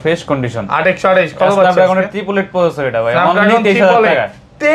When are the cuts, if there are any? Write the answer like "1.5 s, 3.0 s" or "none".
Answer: none